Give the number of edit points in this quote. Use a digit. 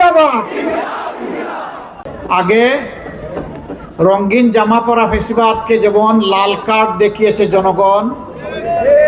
1